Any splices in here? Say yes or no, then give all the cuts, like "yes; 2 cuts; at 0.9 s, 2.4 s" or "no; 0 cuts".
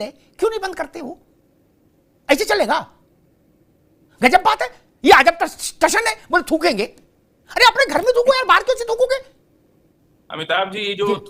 no; 0 cuts